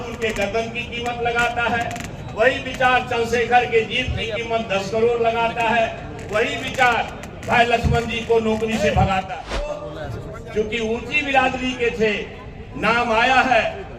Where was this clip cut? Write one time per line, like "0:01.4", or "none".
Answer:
0:09.9